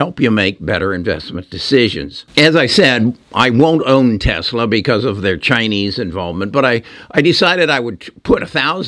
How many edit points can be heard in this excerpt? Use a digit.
1